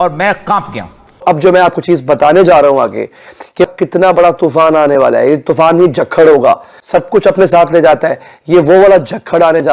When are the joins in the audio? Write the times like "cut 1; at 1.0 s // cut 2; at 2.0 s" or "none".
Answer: cut 1; at 1.2 s // cut 2; at 3.7 s